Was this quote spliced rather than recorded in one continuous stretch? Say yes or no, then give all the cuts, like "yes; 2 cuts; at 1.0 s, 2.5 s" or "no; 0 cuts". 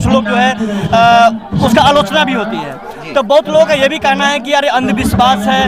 yes; 1 cut; at 1.5 s